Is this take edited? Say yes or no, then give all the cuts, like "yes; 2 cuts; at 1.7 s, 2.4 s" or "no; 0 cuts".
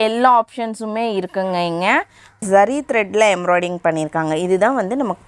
yes; 1 cut; at 2.4 s